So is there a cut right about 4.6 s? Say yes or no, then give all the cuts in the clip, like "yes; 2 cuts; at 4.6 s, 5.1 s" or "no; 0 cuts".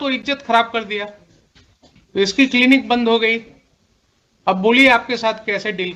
yes; 2 cuts; at 2.3 s, 4.6 s